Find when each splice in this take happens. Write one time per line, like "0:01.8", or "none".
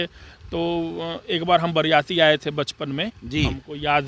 none